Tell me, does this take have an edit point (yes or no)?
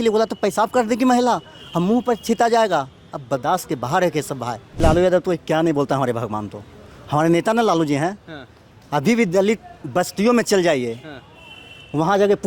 yes